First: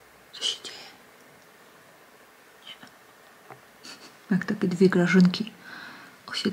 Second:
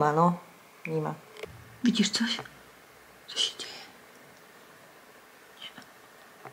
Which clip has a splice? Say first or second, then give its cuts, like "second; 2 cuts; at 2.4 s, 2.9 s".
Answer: second; 1 cut; at 1.4 s